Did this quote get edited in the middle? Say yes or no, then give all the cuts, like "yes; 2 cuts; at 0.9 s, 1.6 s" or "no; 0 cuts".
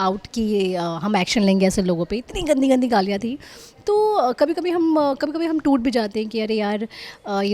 no; 0 cuts